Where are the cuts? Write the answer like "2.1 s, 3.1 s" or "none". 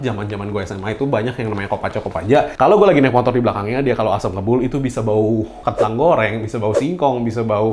none